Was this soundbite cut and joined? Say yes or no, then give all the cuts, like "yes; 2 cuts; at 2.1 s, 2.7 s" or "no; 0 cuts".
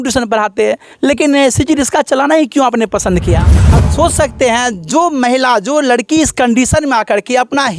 yes; 1 cut; at 3.5 s